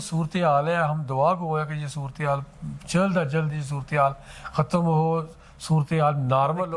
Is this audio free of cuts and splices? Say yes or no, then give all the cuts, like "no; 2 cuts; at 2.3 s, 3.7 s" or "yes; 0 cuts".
yes; 0 cuts